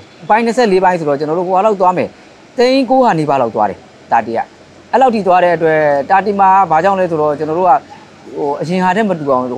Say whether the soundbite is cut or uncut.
uncut